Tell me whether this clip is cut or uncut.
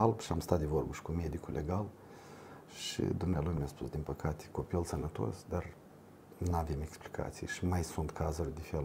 uncut